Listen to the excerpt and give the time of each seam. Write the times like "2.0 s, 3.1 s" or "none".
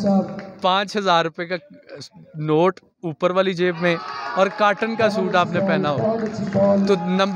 none